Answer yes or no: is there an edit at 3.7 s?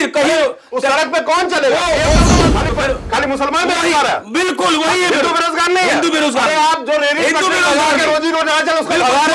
no